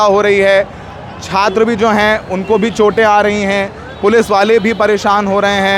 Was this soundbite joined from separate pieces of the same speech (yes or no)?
no